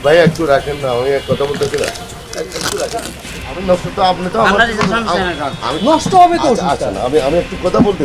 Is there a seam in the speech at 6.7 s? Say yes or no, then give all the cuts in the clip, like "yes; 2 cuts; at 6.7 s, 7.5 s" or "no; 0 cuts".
no; 1 cut; at 3.5 s